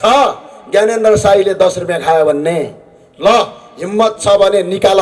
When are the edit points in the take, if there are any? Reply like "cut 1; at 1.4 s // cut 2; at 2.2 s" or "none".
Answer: none